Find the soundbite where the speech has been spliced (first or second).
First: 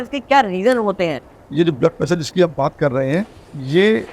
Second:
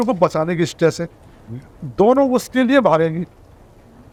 first